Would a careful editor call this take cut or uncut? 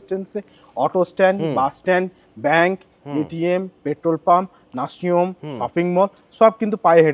uncut